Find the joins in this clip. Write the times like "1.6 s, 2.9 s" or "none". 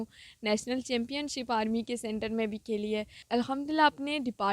3.2 s